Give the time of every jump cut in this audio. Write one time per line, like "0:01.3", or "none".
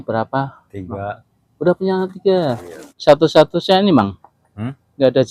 0:02.9